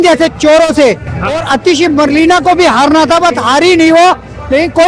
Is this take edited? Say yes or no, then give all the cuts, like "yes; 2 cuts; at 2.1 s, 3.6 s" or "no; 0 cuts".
no; 0 cuts